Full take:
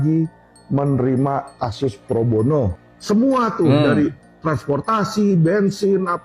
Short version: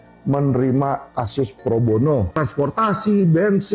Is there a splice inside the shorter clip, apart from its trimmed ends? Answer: yes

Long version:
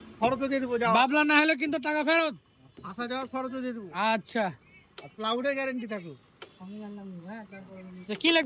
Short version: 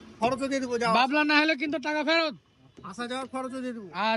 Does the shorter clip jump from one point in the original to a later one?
no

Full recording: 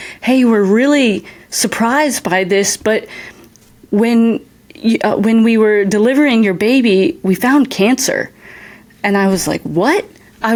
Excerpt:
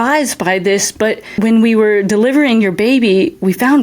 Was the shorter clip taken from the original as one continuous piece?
no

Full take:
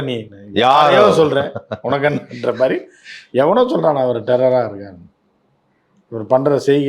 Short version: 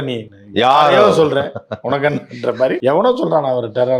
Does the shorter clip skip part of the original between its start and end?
yes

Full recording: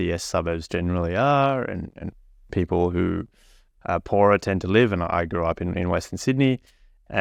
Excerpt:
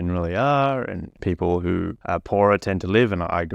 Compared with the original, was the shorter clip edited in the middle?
yes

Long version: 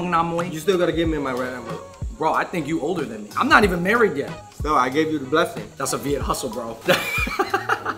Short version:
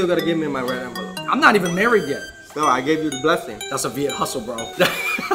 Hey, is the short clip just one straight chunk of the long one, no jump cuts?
no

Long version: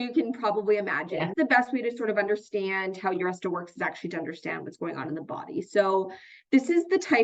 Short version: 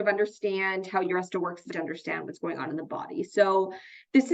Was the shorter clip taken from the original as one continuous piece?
no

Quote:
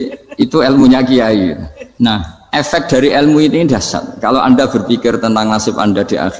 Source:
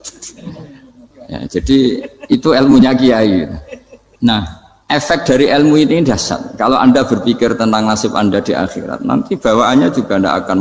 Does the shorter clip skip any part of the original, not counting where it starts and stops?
yes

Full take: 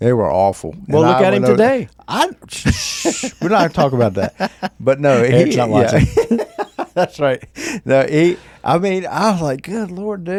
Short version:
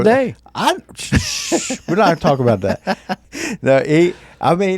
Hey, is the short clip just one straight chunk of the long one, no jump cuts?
no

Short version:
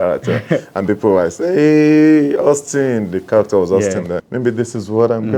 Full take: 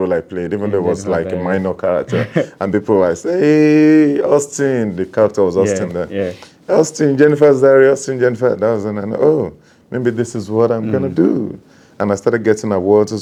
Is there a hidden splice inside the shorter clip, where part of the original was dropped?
yes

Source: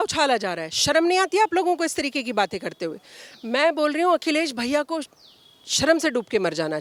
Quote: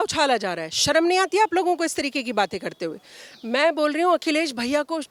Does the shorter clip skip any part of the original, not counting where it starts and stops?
no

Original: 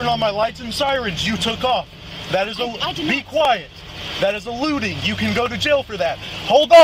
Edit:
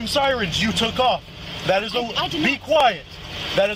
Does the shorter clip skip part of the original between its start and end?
no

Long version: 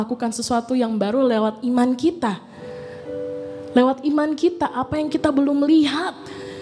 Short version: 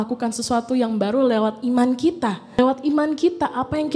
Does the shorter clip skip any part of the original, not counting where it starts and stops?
yes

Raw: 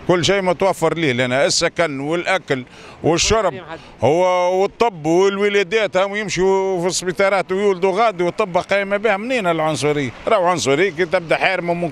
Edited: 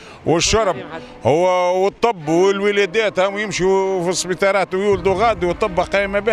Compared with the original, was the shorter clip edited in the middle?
no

